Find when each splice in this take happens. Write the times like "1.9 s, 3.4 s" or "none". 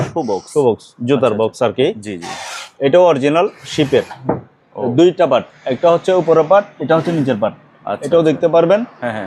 none